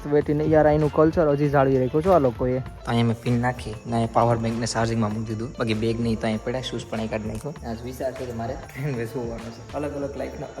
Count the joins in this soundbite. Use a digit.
5